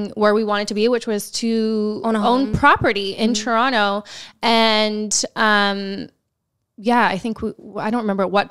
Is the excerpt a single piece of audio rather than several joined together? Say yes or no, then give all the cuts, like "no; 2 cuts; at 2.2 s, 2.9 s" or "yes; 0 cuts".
yes; 0 cuts